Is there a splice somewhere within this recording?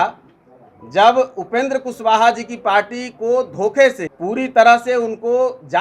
yes; 1 cut; at 4.1 s

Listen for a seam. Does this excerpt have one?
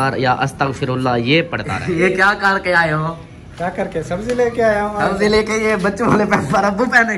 yes; 1 cut; at 1.7 s

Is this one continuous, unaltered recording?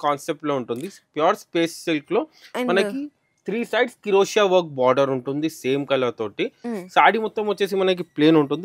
yes; 0 cuts

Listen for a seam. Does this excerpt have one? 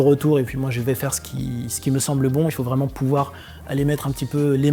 no; 0 cuts

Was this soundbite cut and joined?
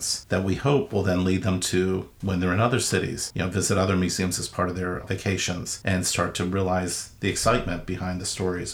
no; 0 cuts

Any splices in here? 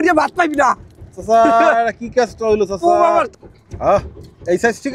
yes; 1 cut; at 3.3 s

